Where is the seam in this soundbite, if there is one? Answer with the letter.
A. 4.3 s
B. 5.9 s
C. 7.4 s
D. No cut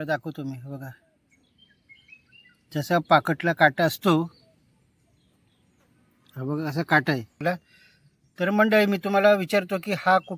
C